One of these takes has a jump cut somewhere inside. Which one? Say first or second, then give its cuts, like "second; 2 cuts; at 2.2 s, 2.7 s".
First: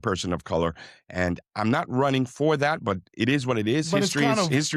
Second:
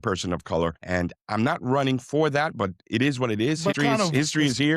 second; 2 cuts; at 0.8 s, 3.7 s